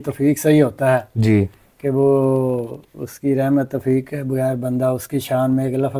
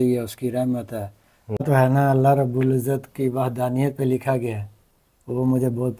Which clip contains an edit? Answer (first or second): second